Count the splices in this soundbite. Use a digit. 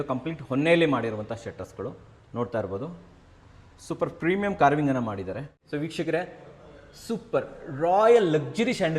1